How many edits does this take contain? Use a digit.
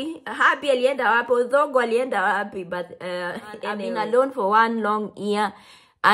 1